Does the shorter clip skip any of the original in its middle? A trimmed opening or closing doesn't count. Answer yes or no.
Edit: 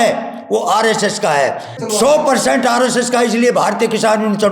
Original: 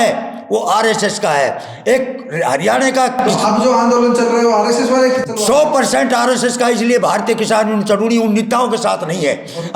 yes